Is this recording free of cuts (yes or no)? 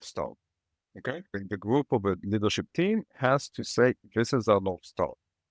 no